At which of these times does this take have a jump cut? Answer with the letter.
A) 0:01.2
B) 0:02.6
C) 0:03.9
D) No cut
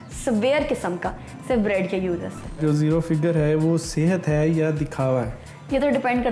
B